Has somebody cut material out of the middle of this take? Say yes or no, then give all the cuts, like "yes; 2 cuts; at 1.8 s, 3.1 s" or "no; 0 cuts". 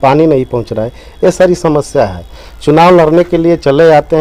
no; 0 cuts